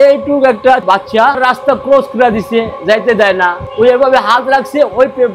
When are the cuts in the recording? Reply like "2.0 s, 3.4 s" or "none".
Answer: 1.1 s, 3.7 s